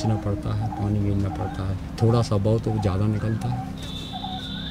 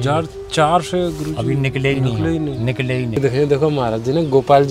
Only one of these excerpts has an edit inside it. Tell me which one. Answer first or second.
second